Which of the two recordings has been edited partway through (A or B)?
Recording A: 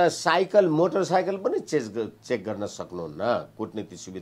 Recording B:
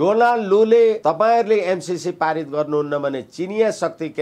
B